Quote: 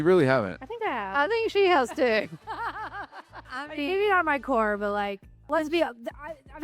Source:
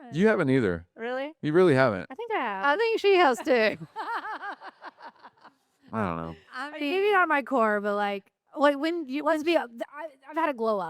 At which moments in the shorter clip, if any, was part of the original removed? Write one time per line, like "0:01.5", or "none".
0:03.4
0:05.5